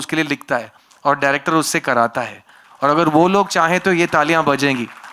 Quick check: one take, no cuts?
yes; 0 cuts

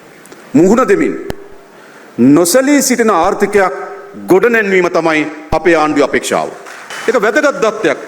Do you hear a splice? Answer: yes; 1 cut; at 6.3 s

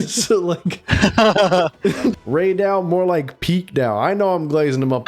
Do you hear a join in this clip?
yes; 1 cut; at 2.2 s

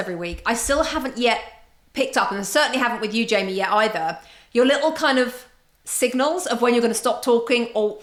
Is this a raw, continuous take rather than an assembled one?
yes; 0 cuts

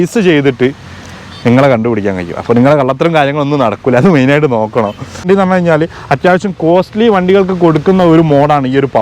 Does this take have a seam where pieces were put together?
yes; 1 cut; at 5.2 s

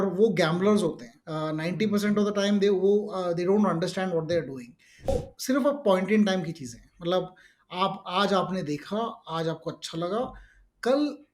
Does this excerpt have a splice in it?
yes; 1 cut; at 5.1 s

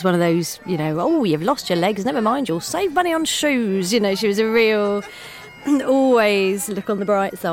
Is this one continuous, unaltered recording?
yes; 0 cuts

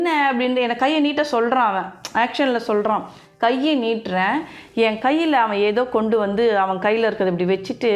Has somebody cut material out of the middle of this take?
no; 0 cuts

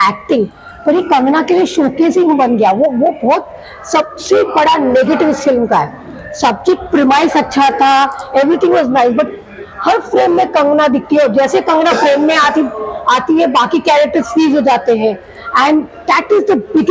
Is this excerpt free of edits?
yes; 0 cuts

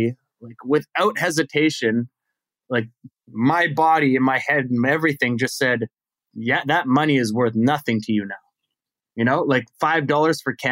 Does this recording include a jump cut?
no; 0 cuts

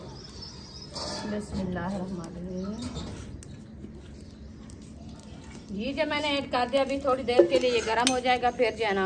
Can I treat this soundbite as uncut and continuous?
yes; 0 cuts

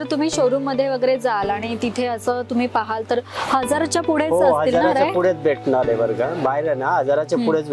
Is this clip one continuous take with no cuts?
yes; 0 cuts

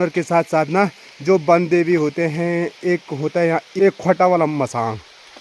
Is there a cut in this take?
yes; 1 cut; at 3.7 s

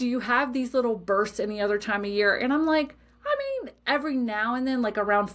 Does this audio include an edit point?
no; 0 cuts

